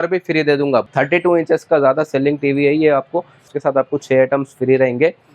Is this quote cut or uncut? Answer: cut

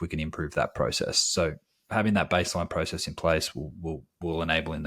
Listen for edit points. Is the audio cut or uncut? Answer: uncut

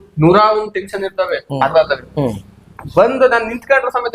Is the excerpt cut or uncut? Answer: cut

